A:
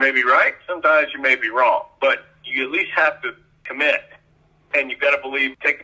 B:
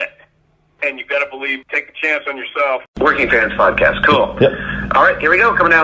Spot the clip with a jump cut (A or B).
B